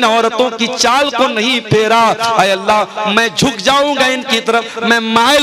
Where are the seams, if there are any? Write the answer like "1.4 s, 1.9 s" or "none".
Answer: none